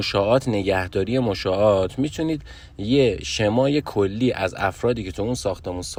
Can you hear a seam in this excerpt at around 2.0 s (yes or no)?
no